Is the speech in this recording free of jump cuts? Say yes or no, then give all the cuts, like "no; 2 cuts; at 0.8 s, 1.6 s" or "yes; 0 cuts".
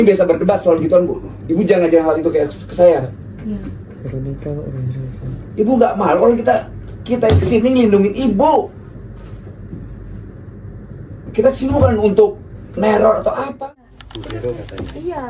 no; 1 cut; at 13.5 s